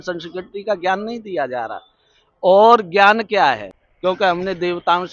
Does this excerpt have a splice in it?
yes; 1 cut; at 3.7 s

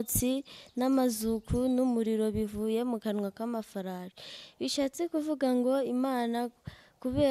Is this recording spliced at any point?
no; 0 cuts

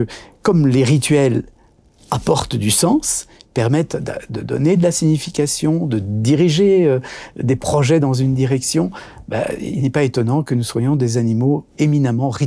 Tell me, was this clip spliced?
no; 0 cuts

